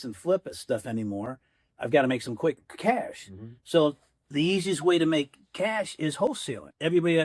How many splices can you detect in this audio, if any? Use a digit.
0